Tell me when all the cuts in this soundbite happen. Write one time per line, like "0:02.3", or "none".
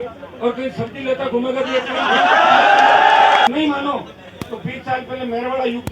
0:03.5